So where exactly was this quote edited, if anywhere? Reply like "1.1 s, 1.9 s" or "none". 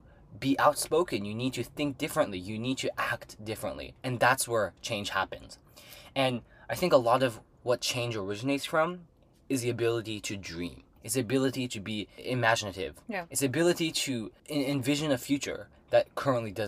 4.0 s, 11.0 s, 12.1 s, 14.4 s